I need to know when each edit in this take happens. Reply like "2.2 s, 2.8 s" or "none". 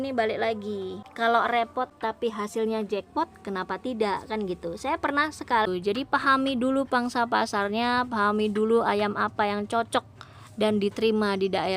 1.0 s, 1.9 s, 5.7 s

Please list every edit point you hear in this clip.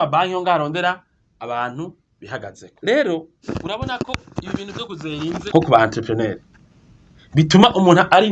2.6 s, 3.3 s, 5.5 s

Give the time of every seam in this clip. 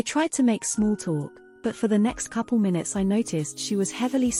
none

